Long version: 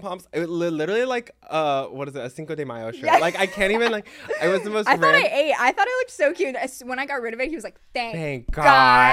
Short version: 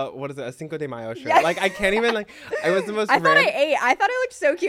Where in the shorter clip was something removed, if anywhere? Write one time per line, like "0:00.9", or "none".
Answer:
none

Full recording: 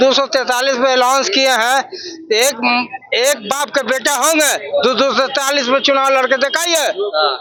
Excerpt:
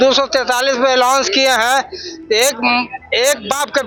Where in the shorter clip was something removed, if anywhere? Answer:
none

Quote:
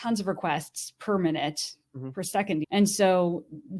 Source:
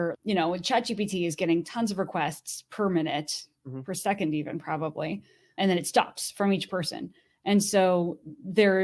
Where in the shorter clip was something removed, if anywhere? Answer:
0:02.6

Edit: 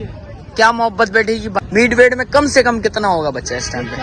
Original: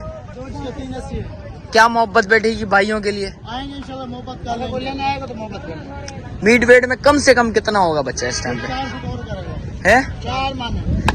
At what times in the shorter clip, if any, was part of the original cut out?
0:01.8

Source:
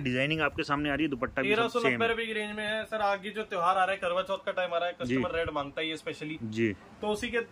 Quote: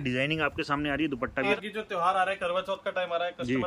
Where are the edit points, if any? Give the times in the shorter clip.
0:01.6

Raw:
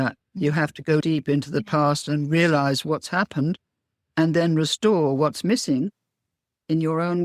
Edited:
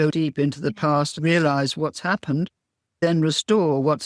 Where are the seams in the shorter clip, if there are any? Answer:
0:01.1
0:03.0

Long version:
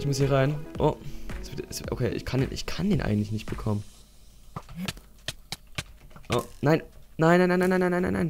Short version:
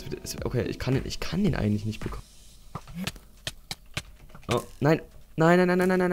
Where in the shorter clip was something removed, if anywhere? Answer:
0:02.1

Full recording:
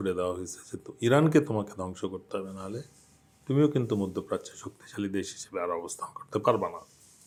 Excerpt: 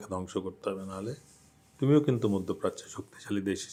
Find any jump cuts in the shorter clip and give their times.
none

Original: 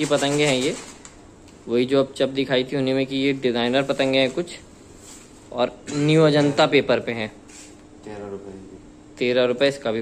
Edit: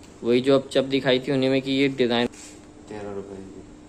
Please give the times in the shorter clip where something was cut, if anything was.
0:02.3

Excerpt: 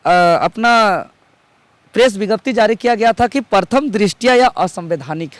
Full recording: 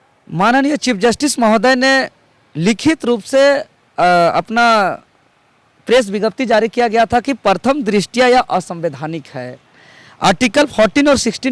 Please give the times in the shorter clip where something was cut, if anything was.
none

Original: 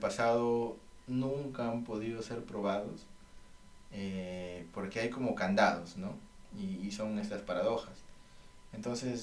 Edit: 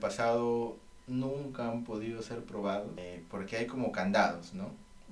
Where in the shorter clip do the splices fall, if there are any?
0:03.0

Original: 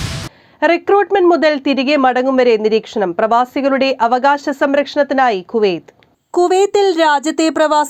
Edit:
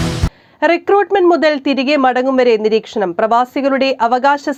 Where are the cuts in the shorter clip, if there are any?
none

